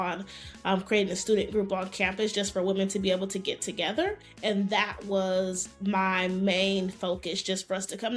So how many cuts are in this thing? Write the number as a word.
one